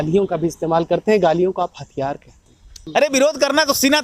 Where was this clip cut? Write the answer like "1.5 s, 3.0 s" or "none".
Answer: 2.7 s